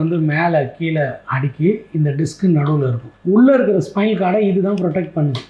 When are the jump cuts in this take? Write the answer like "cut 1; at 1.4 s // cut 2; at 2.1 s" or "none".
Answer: cut 1; at 3.0 s